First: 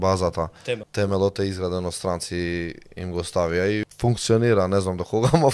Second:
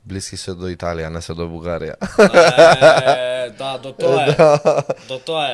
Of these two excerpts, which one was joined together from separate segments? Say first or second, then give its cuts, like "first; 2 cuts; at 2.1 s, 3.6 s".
first; 2 cuts; at 0.9 s, 3.9 s